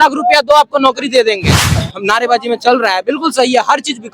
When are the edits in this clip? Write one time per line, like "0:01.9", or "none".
0:01.7